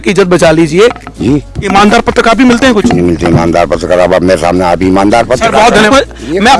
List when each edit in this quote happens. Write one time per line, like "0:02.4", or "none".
0:01.1
0:05.9